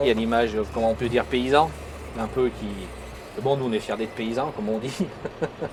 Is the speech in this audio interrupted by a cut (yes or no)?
no